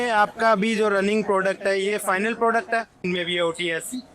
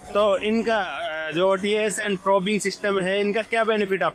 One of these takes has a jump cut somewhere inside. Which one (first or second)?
first